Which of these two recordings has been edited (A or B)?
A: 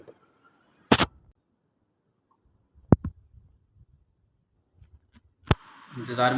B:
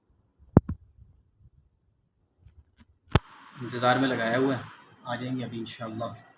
A